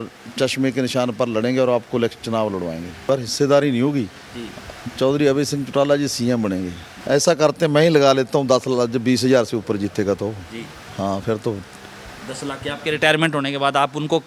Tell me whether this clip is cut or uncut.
cut